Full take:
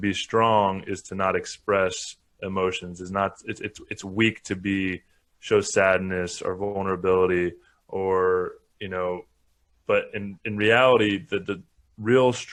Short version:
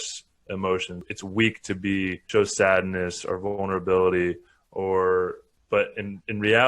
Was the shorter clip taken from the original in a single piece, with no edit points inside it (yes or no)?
no